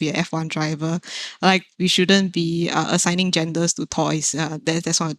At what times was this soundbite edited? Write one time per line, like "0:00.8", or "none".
0:01.7

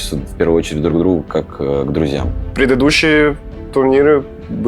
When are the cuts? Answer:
0:02.4

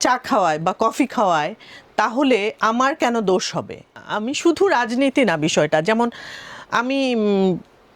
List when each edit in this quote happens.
0:04.0

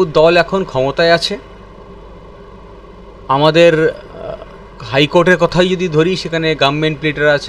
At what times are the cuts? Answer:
none

